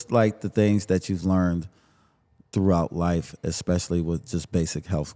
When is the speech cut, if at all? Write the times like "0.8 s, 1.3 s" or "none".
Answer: none